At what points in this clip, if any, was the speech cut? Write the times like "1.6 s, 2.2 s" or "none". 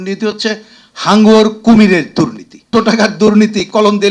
2.7 s